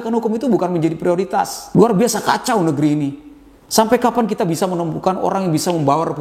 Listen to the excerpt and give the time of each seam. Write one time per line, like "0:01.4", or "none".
0:01.6